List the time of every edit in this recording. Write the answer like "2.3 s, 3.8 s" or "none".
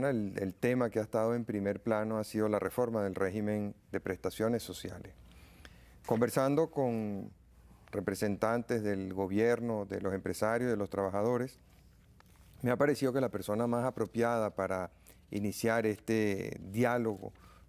none

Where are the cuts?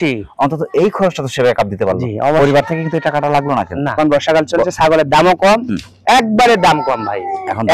4.0 s

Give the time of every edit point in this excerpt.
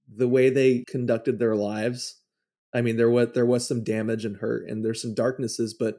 0.9 s

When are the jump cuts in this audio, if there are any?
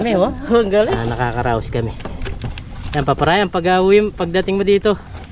1.0 s

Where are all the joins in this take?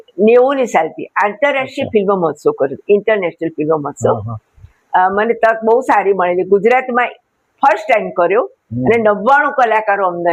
none

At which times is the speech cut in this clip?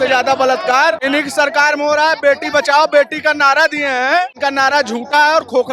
1.0 s, 4.3 s

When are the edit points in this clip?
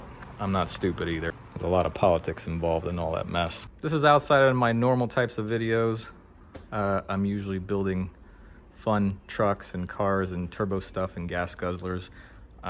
1.4 s, 3.6 s

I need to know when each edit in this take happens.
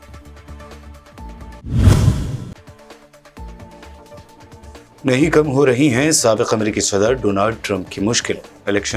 1.6 s

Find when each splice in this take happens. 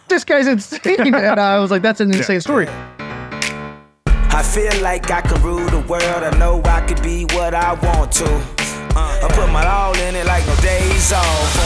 3.1 s

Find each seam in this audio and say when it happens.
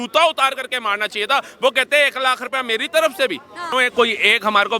3.7 s

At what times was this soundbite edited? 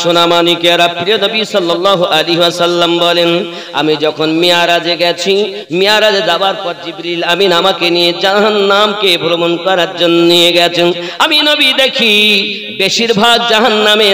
none

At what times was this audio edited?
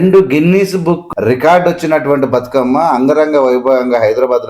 1.1 s

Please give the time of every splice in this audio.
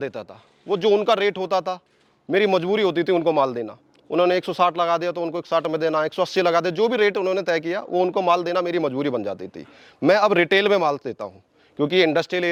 none

